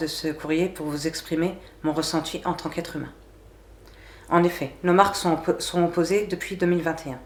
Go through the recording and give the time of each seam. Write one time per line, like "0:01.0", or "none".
none